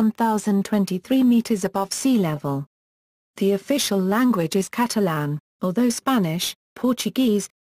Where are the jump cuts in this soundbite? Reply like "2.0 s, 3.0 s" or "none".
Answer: 4.1 s